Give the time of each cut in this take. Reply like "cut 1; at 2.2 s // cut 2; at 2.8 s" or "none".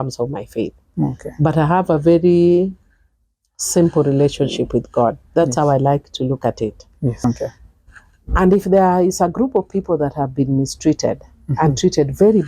cut 1; at 7.2 s